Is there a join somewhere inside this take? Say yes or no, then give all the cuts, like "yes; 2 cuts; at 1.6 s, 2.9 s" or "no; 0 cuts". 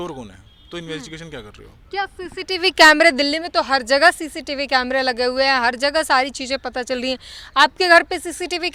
no; 0 cuts